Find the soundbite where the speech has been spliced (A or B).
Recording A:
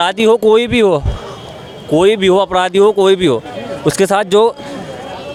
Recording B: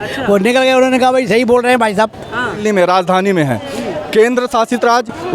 B